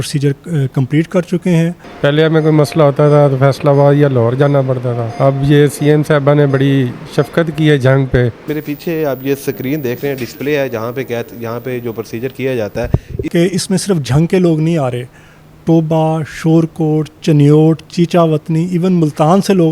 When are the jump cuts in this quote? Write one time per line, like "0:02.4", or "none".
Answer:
0:01.8
0:05.1
0:08.4
0:13.1